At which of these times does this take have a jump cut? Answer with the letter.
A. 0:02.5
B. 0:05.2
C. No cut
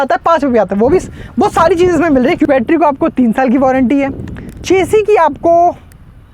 A